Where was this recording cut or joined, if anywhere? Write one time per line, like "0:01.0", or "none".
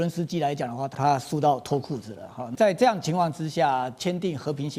0:00.9
0:02.4

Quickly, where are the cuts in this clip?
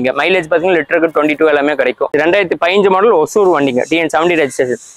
0:02.1

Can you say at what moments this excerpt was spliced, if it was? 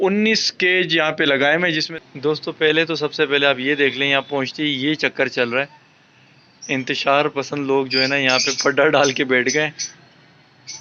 0:01.9

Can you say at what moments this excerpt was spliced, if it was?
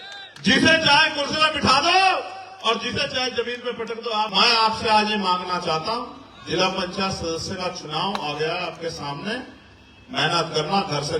0:04.3

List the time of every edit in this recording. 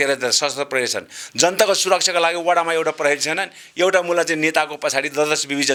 none

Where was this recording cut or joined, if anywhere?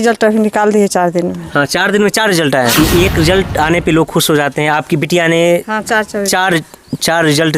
0:02.7

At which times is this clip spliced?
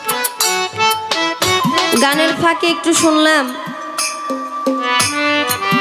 0:01.6

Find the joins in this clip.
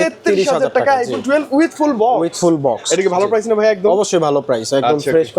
none

